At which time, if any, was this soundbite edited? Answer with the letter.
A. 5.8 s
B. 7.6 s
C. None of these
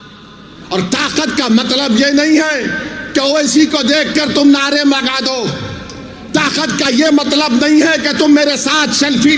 C